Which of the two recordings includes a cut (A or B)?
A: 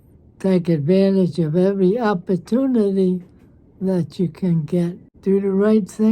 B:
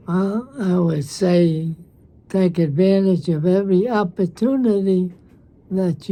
A